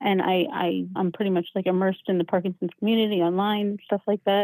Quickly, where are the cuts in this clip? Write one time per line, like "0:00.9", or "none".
0:00.9